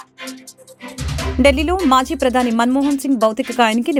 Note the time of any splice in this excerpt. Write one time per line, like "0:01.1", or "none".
none